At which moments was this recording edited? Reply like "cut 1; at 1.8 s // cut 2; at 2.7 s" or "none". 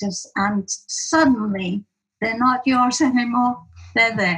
none